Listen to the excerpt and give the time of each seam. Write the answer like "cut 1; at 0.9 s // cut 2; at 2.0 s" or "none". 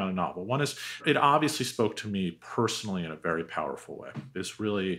cut 1; at 1.0 s